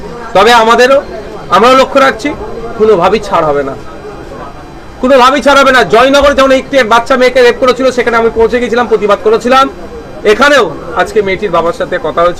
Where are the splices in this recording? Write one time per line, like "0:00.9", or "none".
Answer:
none